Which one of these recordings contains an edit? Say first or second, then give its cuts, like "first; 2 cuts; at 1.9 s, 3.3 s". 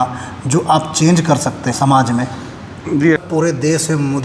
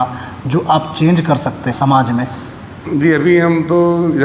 first; 1 cut; at 3.2 s